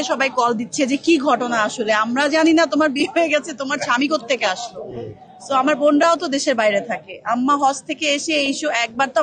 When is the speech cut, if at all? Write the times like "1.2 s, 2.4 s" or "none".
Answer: none